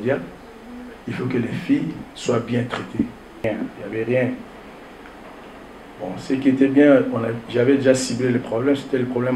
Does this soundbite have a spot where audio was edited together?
yes; 1 cut; at 3.4 s

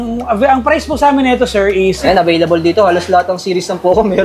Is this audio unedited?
no; 1 cut; at 2.0 s

